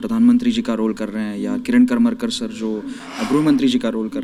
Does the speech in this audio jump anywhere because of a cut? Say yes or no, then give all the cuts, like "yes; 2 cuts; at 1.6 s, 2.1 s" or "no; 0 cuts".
no; 0 cuts